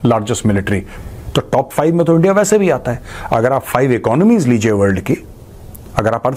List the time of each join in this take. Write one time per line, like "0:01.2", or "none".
0:00.9